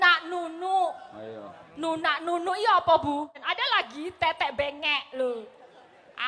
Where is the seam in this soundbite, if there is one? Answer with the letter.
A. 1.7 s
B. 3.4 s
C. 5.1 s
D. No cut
B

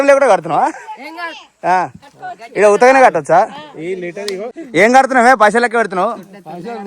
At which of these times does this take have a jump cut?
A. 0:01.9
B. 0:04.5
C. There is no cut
B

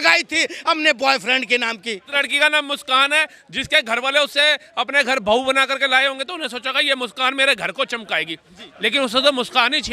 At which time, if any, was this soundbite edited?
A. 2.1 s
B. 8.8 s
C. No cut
A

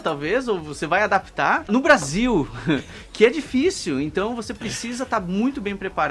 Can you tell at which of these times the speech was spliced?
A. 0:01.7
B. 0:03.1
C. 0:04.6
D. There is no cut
A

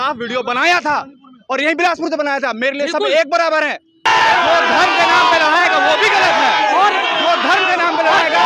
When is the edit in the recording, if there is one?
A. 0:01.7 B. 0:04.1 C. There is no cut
B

